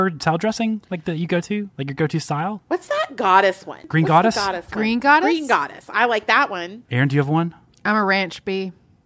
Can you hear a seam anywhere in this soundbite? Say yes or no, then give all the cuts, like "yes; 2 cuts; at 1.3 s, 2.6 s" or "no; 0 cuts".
yes; 3 cuts; at 2.6 s, 3.8 s, 6.8 s